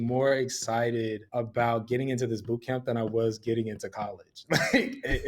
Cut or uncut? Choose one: cut